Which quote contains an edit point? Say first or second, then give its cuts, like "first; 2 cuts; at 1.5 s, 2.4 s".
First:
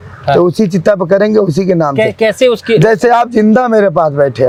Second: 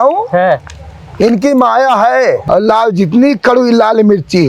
second; 1 cut; at 2.4 s